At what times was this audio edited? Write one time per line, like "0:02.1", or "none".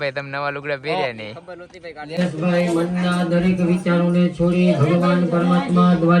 0:02.1